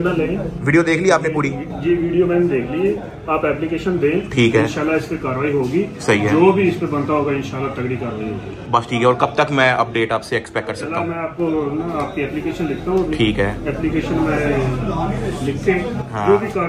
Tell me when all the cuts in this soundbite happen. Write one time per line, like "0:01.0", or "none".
none